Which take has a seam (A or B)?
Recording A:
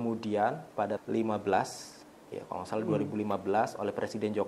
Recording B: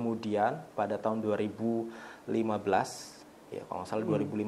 A